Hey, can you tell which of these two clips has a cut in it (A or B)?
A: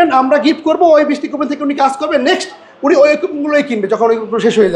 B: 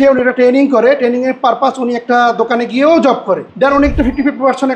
B